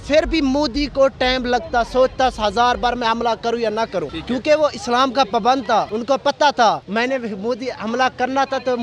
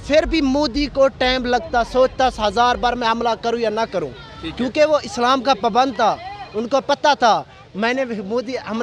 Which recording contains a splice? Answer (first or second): first